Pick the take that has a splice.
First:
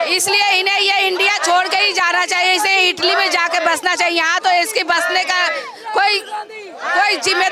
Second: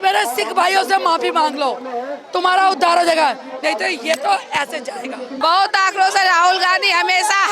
second; 1 cut; at 5.3 s

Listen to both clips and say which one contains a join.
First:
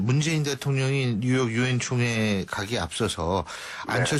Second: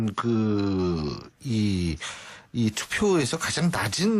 second; 1 cut; at 1.3 s

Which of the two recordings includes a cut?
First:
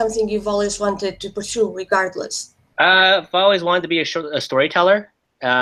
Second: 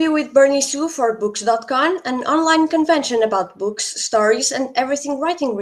first; 1 cut; at 4.5 s

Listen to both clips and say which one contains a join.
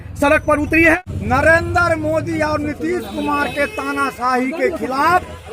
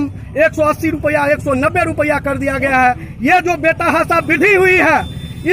first; 1 cut; at 0.9 s

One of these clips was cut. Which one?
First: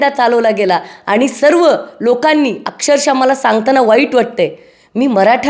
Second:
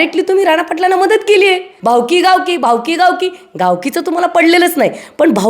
second; 1 cut; at 1.7 s

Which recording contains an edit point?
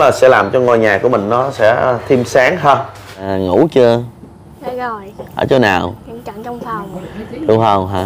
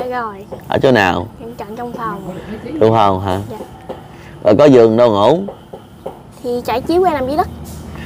first; 1 cut; at 3.2 s

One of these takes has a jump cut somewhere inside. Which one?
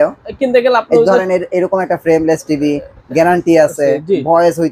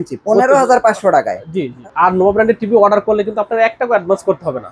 second; 1 cut; at 1.8 s

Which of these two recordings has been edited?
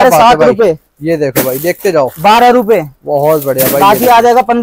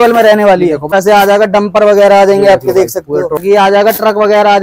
second; 2 cuts; at 0.8 s, 3.4 s

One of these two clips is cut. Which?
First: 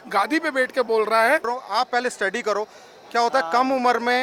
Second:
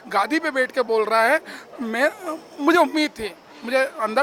first; 1 cut; at 1.5 s

